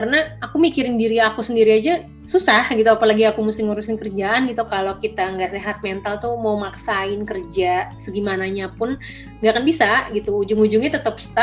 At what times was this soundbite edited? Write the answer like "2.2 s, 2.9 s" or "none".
4.7 s